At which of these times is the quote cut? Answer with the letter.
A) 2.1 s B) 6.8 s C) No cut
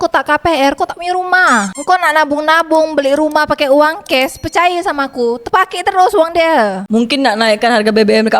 B